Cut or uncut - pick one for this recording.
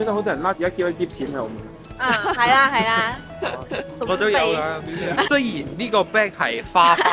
cut